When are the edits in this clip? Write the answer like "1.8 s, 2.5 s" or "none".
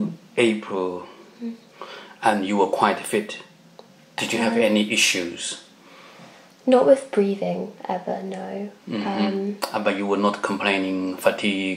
none